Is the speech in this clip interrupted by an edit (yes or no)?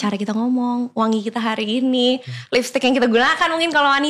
no